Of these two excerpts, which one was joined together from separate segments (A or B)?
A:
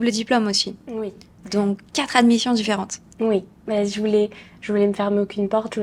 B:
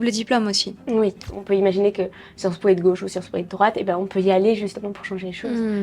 B